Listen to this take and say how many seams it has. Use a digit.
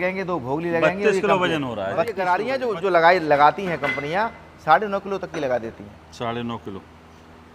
1